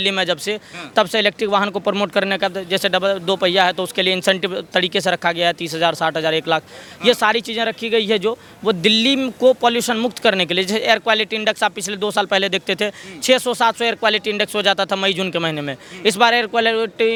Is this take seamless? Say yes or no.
yes